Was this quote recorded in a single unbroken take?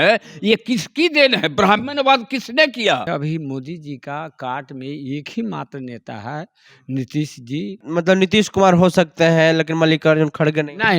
no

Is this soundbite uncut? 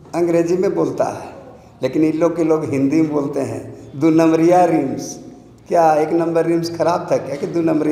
yes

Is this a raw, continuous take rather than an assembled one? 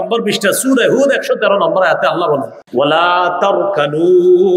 no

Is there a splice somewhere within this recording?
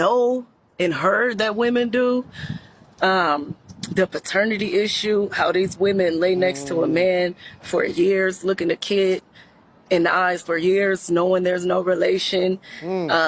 no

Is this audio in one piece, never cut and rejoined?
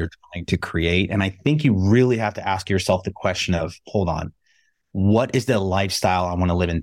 yes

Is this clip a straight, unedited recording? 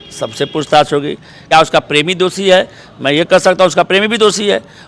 no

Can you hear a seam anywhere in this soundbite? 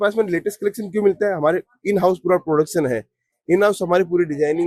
no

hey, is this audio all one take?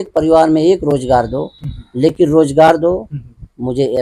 yes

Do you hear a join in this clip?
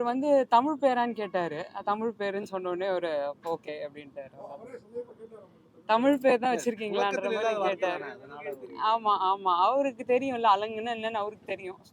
no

